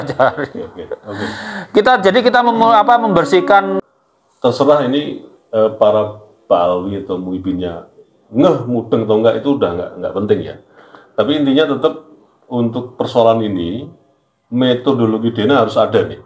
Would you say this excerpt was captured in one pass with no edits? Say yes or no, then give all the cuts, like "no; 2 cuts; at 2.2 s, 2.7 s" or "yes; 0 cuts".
no; 1 cut; at 3.8 s